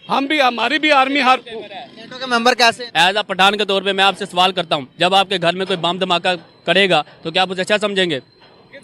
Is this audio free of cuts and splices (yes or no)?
no